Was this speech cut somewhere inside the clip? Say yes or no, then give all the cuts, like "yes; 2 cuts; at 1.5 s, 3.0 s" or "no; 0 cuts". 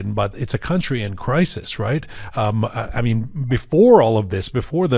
no; 0 cuts